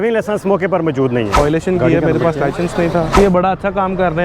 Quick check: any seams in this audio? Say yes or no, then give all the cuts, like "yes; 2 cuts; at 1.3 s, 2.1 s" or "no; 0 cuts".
yes; 2 cuts; at 1.4 s, 3.2 s